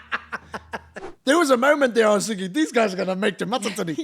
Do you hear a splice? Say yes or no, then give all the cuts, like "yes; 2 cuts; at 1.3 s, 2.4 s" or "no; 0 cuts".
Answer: yes; 1 cut; at 1.0 s